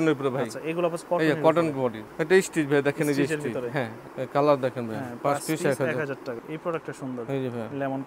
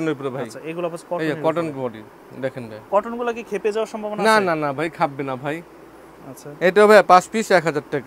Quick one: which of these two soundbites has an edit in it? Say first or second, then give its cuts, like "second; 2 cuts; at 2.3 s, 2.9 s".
first; 3 cuts; at 2.1 s, 4.0 s, 6.4 s